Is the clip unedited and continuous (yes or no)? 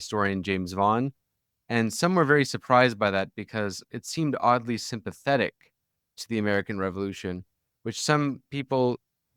no